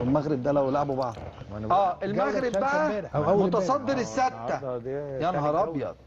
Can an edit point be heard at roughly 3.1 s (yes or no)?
yes